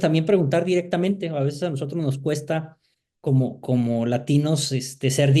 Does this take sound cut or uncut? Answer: uncut